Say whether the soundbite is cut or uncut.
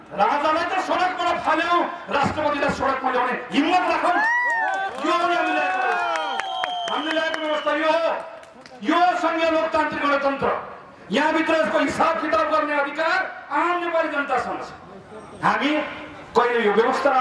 uncut